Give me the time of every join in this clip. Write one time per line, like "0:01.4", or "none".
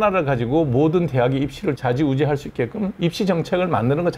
none